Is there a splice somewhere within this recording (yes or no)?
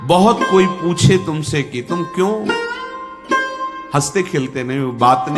yes